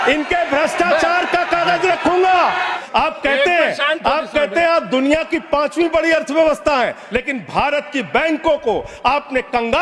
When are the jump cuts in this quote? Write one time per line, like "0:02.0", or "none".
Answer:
0:02.8
0:07.0

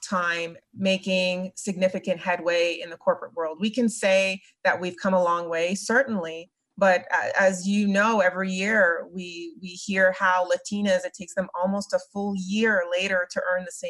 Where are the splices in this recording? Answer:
none

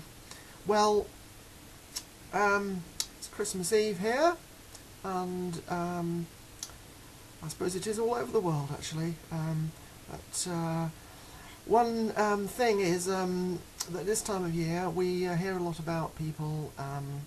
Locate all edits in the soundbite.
0:12.3

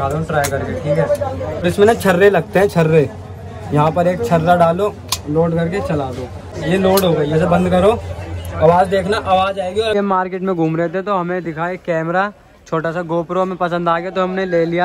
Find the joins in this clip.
0:01.7
0:06.5
0:09.9

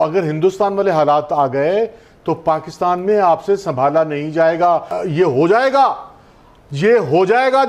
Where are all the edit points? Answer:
0:04.8

